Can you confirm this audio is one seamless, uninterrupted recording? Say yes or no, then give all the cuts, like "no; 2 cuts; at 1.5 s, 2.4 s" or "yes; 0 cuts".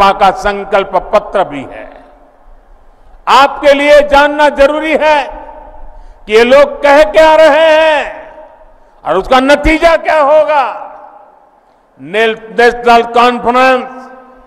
yes; 0 cuts